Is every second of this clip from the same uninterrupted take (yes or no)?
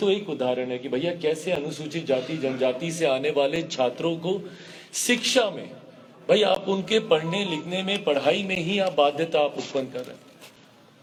yes